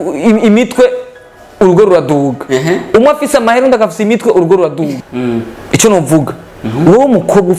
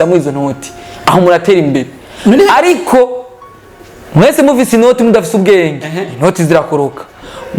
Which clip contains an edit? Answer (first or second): first